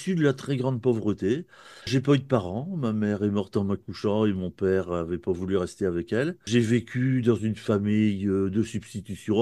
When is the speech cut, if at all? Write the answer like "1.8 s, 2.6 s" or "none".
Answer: 1.9 s, 6.5 s

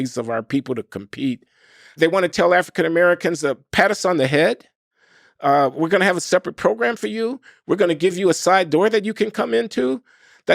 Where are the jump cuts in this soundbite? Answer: 2.0 s

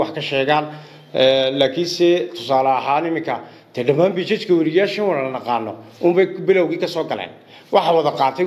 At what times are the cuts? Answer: none

